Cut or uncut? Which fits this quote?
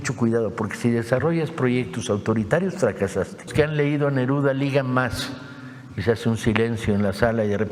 cut